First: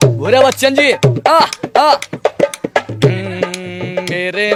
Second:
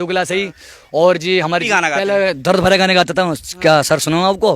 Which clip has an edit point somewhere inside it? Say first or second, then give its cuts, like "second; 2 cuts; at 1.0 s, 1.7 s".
second; 1 cut; at 1.7 s